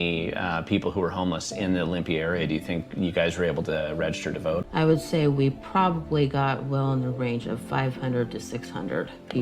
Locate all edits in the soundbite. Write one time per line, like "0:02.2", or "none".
0:04.6